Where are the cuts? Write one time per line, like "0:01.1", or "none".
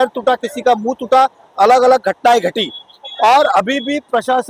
none